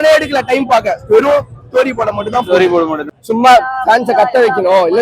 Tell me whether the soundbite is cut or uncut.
cut